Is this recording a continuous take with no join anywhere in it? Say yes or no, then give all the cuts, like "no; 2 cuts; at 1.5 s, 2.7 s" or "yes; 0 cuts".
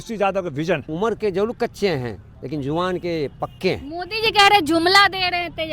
no; 1 cut; at 0.9 s